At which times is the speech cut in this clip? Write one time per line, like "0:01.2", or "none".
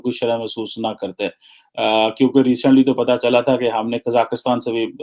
none